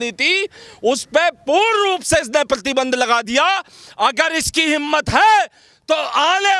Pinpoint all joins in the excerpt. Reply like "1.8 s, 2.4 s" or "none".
none

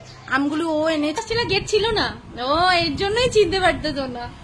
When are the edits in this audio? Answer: 1.2 s

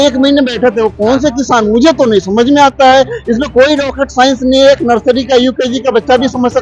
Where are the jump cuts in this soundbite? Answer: none

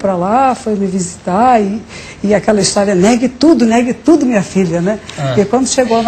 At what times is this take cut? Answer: none

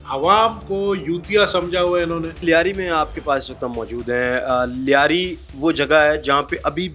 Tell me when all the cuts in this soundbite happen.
none

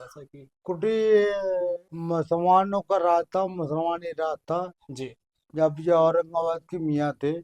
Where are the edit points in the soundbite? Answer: 1.9 s

